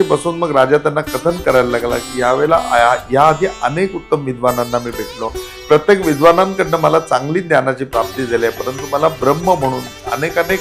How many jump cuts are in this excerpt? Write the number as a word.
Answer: zero